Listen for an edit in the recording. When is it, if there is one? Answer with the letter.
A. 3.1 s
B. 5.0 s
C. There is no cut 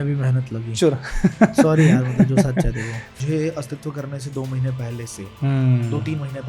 A